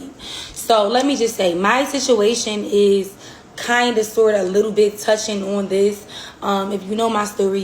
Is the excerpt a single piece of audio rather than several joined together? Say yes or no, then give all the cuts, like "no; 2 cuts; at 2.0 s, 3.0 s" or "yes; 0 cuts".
yes; 0 cuts